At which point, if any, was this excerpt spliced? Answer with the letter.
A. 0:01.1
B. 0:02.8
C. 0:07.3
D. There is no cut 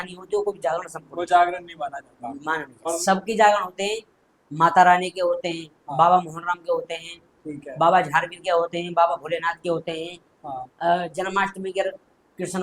B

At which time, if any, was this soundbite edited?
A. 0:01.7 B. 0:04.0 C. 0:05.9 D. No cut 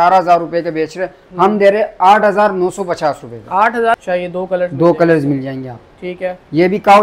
B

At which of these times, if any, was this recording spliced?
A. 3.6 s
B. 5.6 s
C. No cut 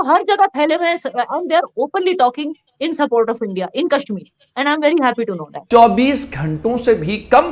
B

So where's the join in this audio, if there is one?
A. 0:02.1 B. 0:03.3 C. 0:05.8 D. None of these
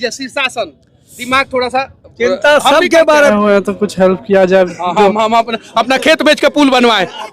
B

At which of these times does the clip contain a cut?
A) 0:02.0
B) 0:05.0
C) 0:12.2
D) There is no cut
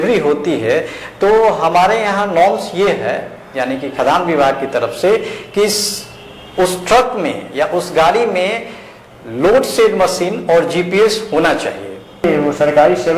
C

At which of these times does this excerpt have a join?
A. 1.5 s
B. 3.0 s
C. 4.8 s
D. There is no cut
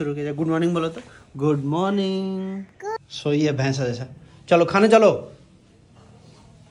B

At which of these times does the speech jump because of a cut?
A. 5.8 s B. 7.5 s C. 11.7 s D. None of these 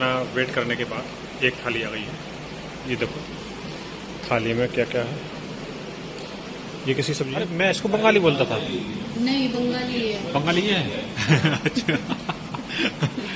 B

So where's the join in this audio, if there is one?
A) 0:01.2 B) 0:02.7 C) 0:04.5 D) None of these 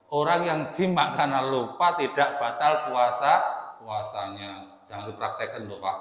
D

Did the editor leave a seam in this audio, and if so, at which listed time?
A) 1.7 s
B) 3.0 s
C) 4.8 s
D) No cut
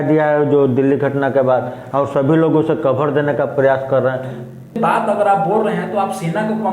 C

